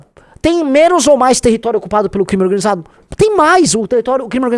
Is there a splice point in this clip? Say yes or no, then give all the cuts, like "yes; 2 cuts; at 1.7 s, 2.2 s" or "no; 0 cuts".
no; 0 cuts